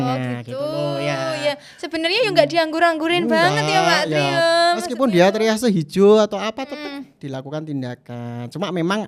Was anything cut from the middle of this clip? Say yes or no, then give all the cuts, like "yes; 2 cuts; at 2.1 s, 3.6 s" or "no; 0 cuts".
no; 0 cuts